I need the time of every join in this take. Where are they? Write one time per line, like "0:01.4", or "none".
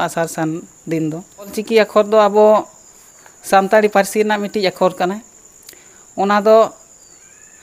0:01.6